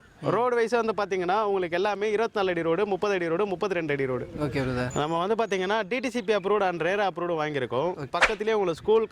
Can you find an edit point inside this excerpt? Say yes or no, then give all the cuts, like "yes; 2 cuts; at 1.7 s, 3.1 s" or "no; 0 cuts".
yes; 2 cuts; at 4.9 s, 8.1 s